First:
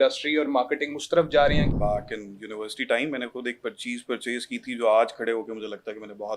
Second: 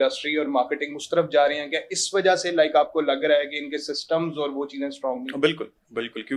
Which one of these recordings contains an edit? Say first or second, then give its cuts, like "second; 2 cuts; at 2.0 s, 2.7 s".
first; 1 cut; at 1.7 s